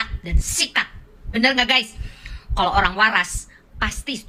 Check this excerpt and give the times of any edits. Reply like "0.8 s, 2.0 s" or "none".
none